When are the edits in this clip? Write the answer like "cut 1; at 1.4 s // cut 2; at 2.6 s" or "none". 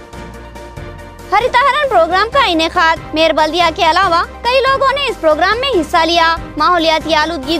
cut 1; at 0.9 s